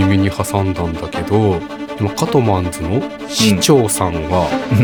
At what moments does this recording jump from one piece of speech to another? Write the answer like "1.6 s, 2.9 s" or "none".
none